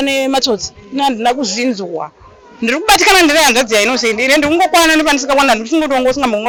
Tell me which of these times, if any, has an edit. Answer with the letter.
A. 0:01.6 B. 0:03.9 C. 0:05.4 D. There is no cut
D